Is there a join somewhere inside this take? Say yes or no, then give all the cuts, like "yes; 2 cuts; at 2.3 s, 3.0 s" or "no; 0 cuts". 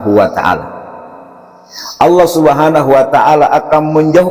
no; 0 cuts